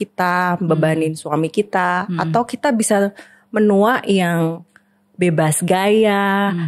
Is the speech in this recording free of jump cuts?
yes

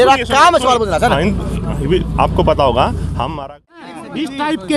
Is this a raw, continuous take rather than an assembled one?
no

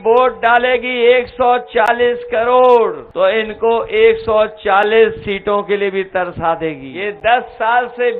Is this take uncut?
no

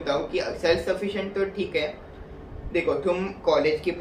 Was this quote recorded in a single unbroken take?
yes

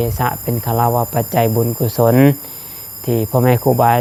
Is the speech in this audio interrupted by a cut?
no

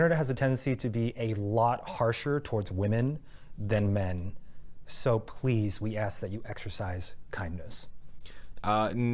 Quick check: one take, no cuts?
yes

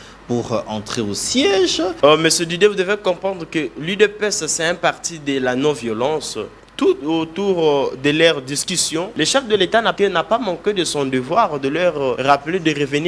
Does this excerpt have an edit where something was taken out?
yes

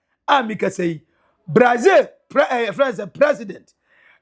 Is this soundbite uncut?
yes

